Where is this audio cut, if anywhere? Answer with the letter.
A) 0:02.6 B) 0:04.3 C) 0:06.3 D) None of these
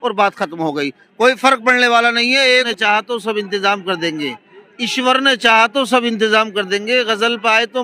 A